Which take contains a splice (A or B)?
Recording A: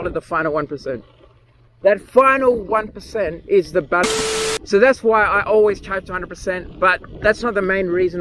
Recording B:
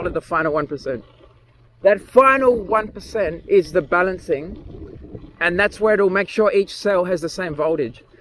A